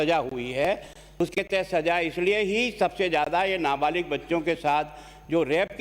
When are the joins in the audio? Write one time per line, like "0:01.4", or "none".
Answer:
0:01.0